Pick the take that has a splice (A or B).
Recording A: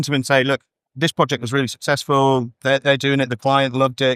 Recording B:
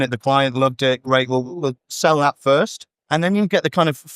B